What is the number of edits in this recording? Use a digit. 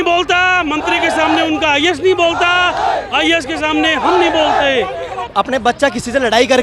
1